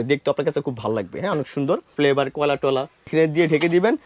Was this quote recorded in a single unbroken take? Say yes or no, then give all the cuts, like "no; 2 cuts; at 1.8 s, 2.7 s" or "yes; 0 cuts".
no; 2 cuts; at 1.9 s, 3.1 s